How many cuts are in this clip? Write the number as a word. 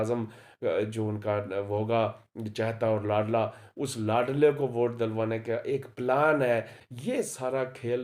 one